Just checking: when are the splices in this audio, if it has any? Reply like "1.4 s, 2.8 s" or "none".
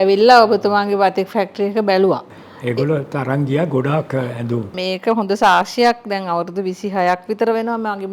2.3 s, 4.8 s